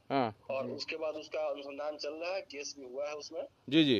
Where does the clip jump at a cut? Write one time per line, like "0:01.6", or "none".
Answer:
none